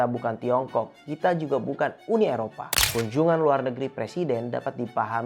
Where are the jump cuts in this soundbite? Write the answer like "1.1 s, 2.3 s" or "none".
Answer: 2.8 s